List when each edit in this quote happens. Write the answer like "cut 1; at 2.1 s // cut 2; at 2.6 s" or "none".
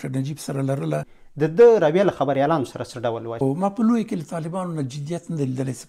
cut 1; at 1.2 s // cut 2; at 3.3 s